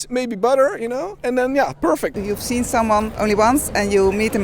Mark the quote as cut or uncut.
cut